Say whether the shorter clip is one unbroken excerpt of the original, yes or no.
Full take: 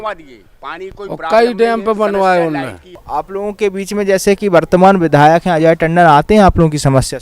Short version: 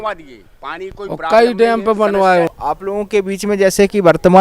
no